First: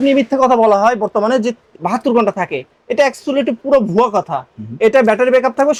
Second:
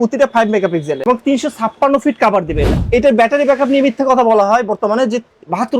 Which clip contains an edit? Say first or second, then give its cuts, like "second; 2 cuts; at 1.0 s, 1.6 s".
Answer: second; 1 cut; at 2.8 s